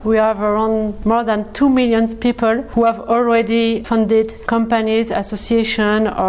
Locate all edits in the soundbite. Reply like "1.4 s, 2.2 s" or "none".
0.9 s, 2.7 s, 4.4 s